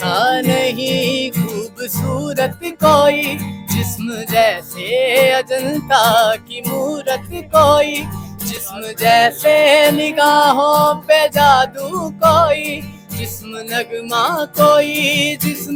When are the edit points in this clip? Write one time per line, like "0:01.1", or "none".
none